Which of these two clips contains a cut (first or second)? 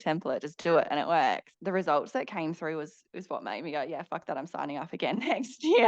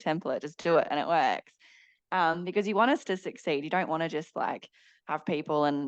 first